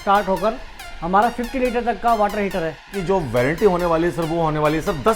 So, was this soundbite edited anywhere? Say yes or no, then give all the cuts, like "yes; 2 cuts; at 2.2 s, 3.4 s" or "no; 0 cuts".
yes; 1 cut; at 2.9 s